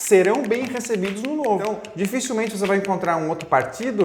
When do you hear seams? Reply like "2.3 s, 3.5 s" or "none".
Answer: 1.8 s